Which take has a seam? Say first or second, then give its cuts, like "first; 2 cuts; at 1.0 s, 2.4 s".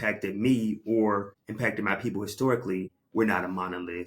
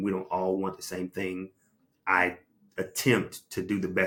first; 2 cuts; at 1.4 s, 3.0 s